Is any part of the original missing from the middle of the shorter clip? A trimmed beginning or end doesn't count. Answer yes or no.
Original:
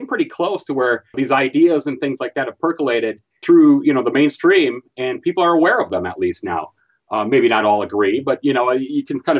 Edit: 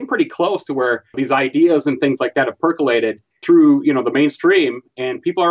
no